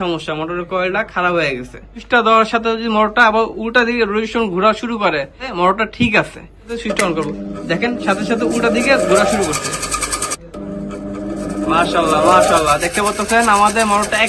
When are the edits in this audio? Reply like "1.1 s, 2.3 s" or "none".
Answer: 2.0 s, 5.5 s, 6.7 s, 10.4 s